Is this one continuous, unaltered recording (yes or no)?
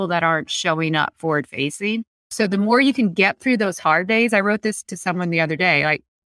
no